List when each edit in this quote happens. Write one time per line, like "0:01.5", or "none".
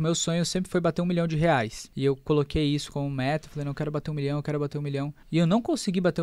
0:01.8
0:05.2